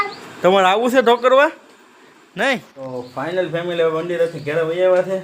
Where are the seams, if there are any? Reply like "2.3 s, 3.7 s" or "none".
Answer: 2.7 s